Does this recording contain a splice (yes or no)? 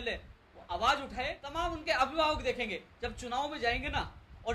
yes